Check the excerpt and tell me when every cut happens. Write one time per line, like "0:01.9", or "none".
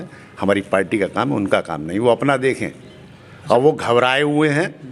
none